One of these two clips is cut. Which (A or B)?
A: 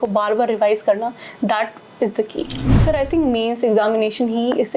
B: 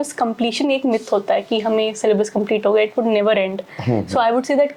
A